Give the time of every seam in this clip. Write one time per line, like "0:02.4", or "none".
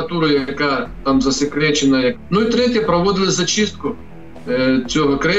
0:02.2

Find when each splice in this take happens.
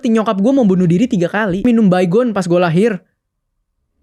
0:01.6

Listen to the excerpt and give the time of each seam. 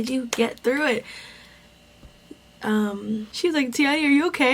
0:03.3

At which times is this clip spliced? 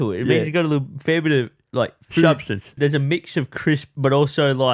0:02.8

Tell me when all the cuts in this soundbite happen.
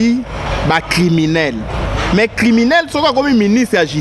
0:01.8

